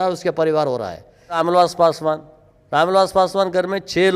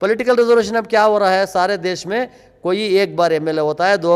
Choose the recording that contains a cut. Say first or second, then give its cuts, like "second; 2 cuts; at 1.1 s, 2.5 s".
first; 1 cut; at 1.4 s